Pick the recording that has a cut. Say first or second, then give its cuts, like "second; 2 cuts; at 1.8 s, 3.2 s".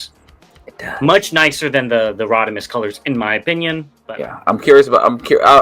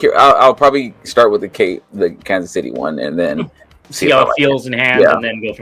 first; 1 cut; at 4.0 s